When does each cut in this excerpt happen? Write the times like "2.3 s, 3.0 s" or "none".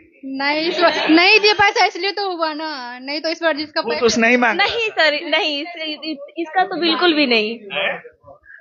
none